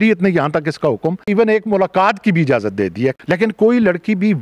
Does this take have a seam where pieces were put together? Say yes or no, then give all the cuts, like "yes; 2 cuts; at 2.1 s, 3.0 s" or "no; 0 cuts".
yes; 2 cuts; at 1.3 s, 3.2 s